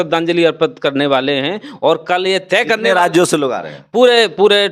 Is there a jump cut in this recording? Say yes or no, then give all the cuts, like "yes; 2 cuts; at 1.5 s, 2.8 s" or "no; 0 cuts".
no; 0 cuts